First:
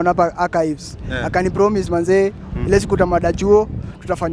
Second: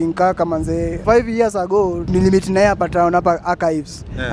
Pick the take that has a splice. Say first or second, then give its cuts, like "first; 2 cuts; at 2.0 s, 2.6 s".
second; 2 cuts; at 0.9 s, 2.0 s